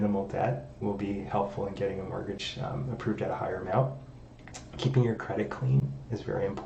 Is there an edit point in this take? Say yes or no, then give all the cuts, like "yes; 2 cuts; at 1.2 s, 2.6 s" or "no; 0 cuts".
no; 0 cuts